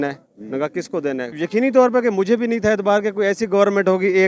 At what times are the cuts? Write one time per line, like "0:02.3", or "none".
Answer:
0:01.3